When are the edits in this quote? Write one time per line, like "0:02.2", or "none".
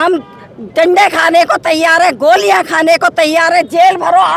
none